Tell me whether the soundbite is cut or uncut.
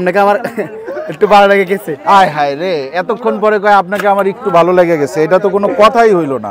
uncut